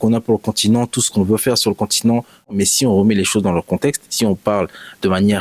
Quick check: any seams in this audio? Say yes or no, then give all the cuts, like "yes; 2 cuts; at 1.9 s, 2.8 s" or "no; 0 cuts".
yes; 1 cut; at 2.5 s